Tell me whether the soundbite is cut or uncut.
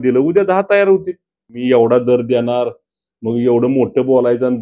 cut